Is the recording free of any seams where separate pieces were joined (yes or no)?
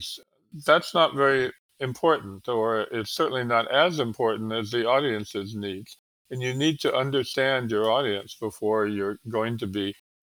no